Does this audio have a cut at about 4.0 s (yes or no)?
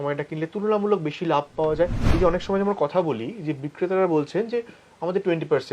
no